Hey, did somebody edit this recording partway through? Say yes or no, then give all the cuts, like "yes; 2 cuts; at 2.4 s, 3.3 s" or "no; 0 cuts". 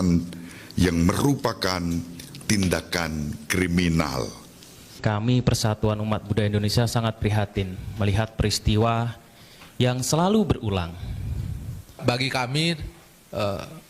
yes; 2 cuts; at 5.0 s, 12.0 s